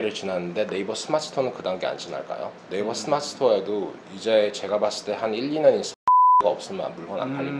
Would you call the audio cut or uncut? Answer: uncut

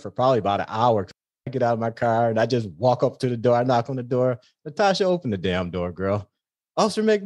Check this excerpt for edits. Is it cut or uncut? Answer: cut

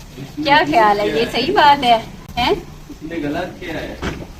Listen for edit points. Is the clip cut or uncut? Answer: uncut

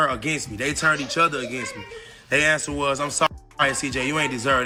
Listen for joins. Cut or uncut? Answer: uncut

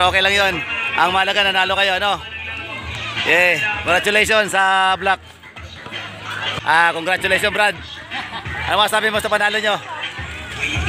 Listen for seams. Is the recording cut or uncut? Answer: cut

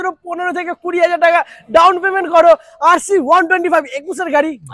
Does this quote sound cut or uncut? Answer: uncut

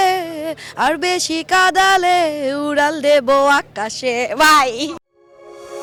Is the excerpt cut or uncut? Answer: uncut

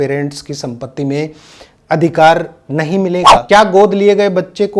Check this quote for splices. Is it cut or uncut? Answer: cut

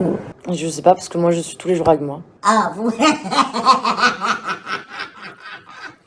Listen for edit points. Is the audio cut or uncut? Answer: uncut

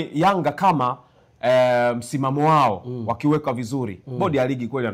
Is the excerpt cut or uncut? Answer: uncut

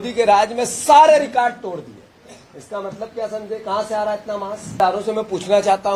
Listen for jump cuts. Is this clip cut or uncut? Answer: cut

